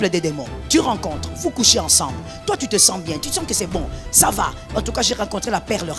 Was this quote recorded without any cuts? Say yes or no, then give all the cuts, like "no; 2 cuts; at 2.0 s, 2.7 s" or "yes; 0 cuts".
yes; 0 cuts